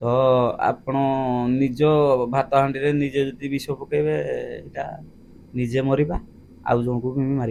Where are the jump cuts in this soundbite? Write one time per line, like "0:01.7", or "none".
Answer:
none